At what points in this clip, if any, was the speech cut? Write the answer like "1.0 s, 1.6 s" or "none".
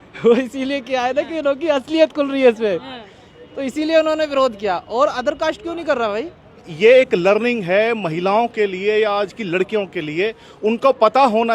6.7 s